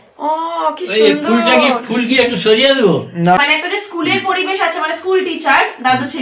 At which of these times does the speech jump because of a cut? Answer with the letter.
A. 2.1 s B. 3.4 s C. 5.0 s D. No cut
B